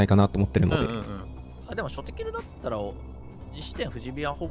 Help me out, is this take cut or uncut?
uncut